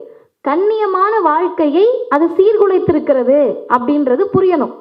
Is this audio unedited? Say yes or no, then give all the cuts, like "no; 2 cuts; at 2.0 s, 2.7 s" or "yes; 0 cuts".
yes; 0 cuts